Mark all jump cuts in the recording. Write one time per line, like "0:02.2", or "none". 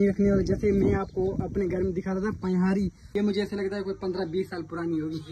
0:03.1